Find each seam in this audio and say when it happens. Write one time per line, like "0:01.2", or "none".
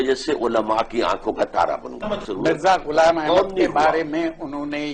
0:02.2